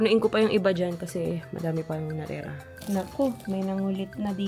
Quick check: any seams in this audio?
no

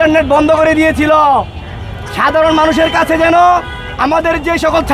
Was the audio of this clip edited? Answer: no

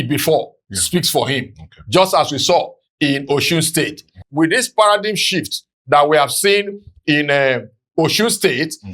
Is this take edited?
yes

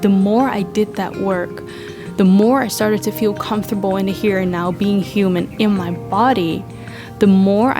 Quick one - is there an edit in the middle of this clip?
no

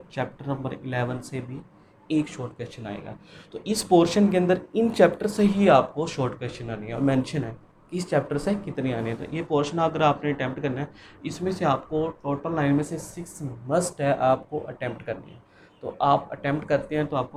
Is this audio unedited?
yes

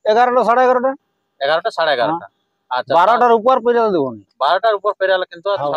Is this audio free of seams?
yes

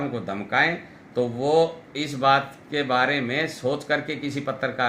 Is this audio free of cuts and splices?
yes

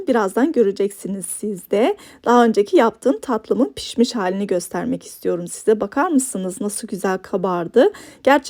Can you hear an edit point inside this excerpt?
no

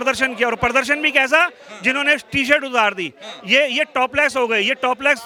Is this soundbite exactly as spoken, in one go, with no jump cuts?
yes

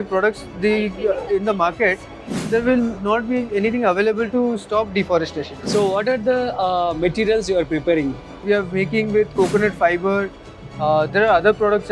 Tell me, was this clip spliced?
yes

